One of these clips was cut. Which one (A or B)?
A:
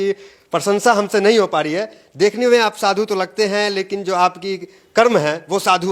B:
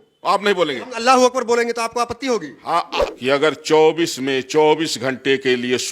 B